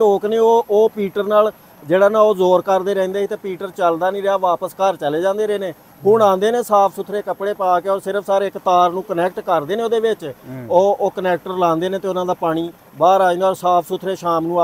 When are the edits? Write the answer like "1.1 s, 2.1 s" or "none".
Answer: none